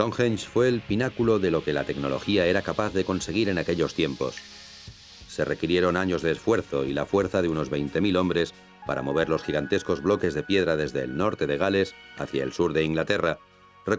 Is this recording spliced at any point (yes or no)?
yes